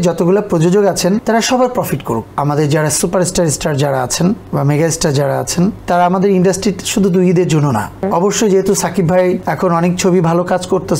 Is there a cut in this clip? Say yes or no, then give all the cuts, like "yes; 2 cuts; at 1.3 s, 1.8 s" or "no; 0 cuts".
yes; 6 cuts; at 1.2 s, 2.3 s, 4.4 s, 5.8 s, 8.0 s, 9.5 s